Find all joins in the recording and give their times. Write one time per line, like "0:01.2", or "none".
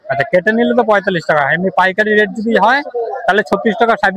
none